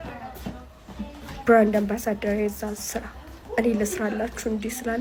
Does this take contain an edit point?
no; 0 cuts

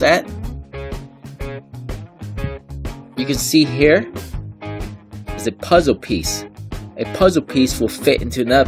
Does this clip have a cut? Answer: yes; 1 cut; at 4.1 s

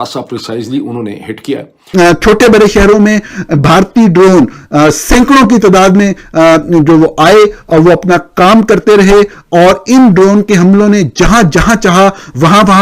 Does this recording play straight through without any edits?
no; 1 cut; at 1.7 s

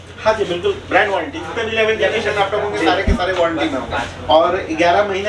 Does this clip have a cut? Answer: no; 0 cuts

